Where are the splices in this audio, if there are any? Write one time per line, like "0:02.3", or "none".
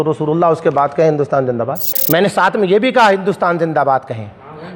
0:02.0